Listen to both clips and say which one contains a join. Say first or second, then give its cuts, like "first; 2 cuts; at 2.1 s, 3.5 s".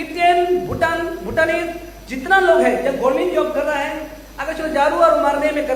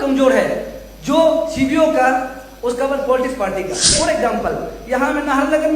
second; 1 cut; at 3.9 s